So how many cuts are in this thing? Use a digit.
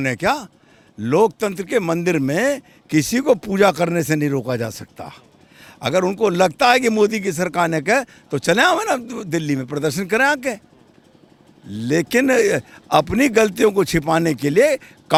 0